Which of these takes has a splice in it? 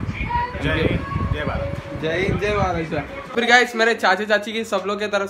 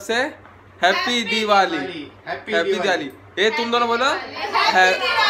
first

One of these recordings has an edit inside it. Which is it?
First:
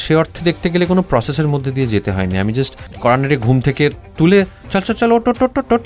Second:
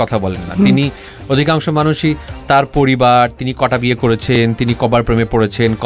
first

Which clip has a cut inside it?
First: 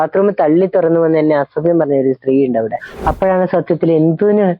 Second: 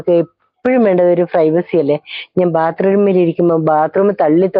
first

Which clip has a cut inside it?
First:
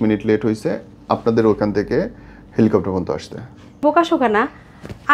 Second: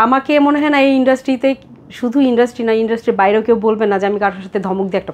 first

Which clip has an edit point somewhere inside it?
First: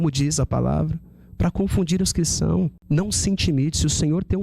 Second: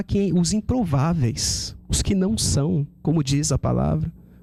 first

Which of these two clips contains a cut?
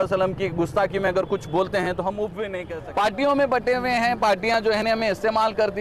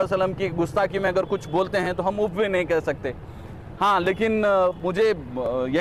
first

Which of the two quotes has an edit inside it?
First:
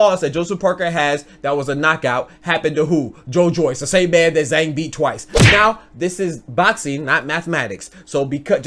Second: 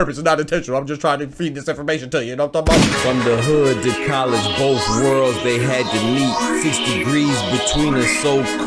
second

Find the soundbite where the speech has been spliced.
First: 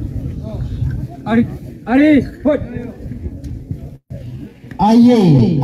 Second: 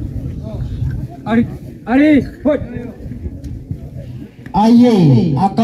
second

